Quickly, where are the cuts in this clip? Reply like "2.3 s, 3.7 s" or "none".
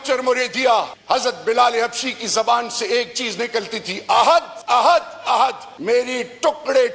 1.0 s, 4.5 s, 5.7 s